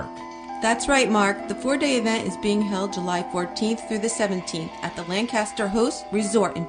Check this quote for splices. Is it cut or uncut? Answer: cut